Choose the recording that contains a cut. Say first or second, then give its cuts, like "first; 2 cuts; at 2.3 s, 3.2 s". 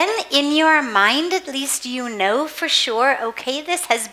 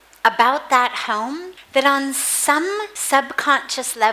second; 2 cuts; at 1.5 s, 2.9 s